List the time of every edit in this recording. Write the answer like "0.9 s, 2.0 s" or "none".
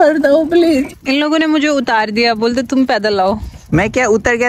0.9 s, 3.5 s